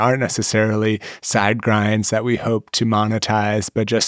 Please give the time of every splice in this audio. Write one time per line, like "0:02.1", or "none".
none